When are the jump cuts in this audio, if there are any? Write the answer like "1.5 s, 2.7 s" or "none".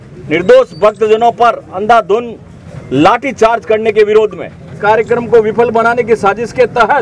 4.7 s